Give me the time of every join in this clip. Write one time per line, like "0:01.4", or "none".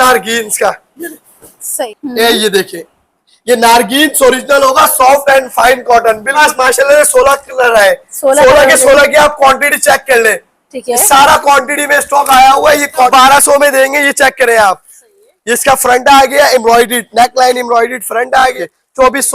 0:01.9
0:06.3
0:13.1
0:18.6